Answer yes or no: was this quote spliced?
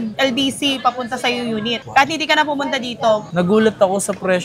yes